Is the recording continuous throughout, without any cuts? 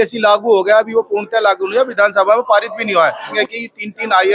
no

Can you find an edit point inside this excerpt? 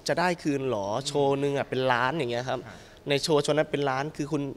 no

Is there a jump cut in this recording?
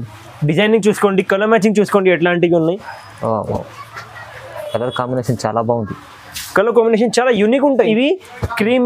yes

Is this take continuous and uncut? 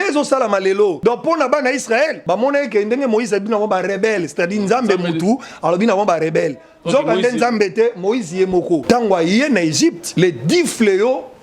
no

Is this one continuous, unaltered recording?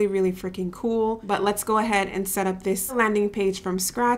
no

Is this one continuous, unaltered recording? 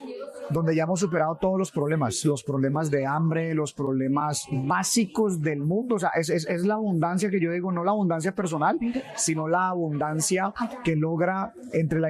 yes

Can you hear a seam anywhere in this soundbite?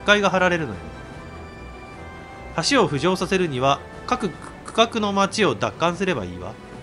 no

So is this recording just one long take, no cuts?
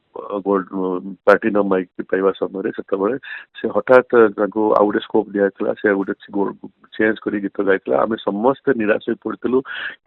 yes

